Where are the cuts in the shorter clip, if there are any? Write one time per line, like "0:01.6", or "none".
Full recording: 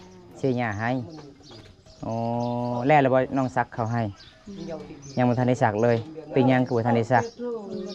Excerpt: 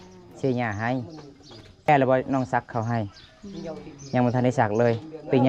0:01.9